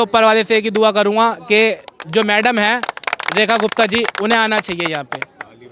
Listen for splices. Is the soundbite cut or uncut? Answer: uncut